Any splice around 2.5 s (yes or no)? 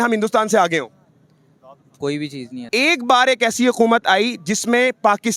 yes